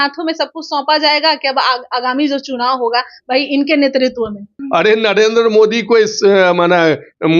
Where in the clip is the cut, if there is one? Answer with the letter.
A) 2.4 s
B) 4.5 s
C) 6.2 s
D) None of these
B